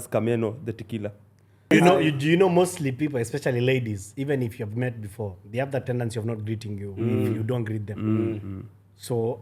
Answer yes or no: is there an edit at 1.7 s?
yes